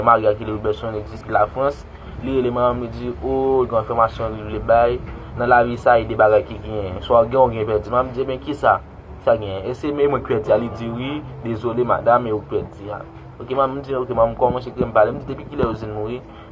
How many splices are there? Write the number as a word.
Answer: one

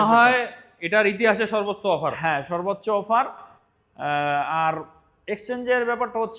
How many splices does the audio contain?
zero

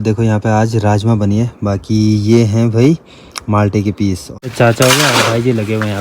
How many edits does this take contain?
one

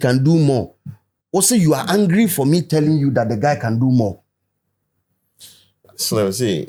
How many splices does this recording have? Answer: zero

